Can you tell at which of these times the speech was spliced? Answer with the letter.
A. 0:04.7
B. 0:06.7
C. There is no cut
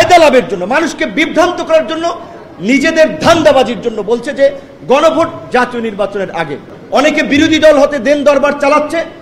B